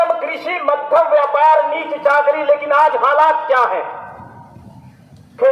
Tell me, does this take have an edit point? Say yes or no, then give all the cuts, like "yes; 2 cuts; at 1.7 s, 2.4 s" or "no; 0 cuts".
no; 0 cuts